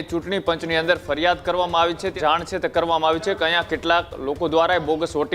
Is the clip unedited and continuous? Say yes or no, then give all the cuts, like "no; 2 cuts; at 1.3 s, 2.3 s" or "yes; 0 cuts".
no; 1 cut; at 2.1 s